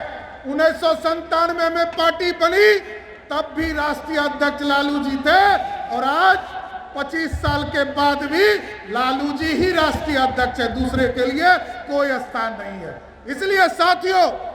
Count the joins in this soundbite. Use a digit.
0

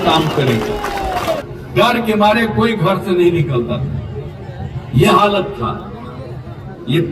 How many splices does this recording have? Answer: 1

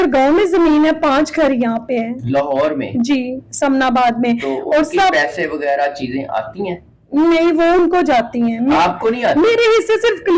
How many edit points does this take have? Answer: 0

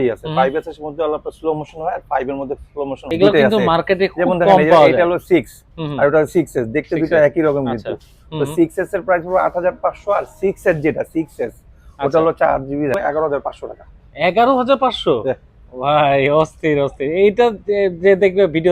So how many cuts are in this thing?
2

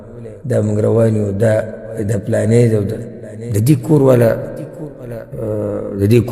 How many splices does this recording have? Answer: 0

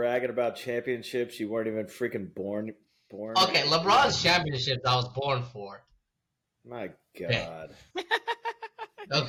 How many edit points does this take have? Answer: 0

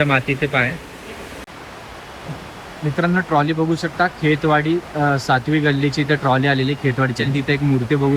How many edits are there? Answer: 1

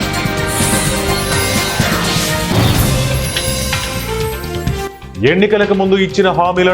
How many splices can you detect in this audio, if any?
1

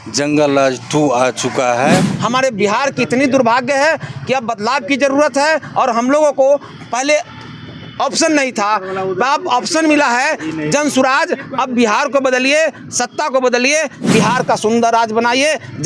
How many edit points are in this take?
2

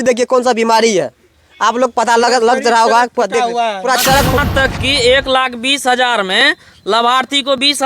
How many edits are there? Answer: 1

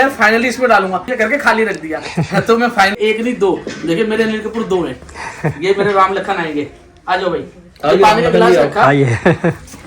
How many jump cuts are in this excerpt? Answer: 2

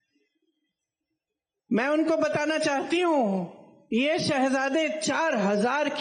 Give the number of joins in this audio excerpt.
0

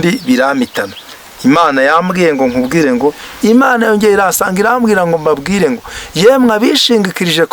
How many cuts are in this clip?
1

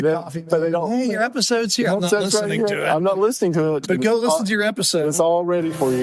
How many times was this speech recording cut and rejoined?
0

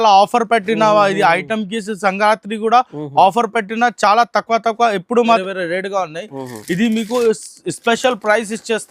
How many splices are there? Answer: 1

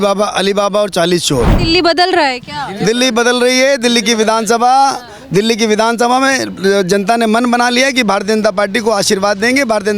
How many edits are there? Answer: 1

